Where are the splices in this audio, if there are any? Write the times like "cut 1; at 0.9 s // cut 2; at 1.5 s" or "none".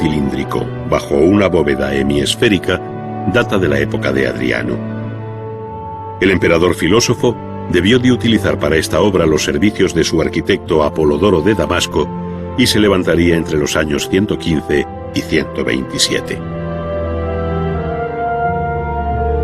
cut 1; at 13.3 s

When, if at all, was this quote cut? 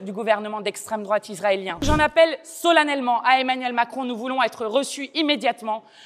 cut 1; at 1.8 s

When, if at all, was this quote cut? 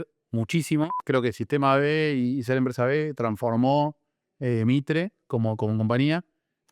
cut 1; at 0.9 s

